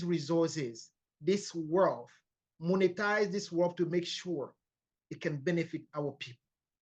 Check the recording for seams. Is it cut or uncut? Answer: uncut